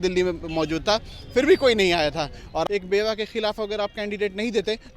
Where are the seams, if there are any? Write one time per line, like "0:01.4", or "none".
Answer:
0:02.7